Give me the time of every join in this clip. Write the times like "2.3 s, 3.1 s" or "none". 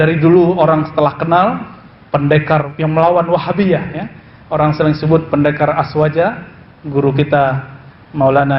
2.7 s